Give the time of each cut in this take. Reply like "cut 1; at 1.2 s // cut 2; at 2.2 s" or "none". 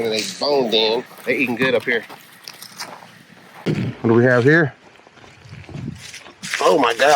cut 1; at 1.1 s // cut 2; at 3.7 s